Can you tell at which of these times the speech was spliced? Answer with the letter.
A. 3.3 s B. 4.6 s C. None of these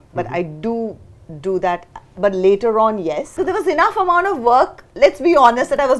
A